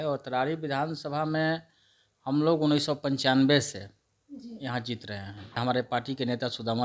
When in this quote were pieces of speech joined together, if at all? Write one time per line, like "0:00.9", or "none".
0:05.6